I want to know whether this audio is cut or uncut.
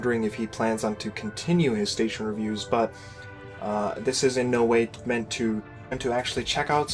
uncut